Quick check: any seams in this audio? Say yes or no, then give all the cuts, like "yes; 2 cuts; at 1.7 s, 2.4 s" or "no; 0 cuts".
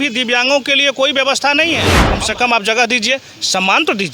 yes; 1 cut; at 2.0 s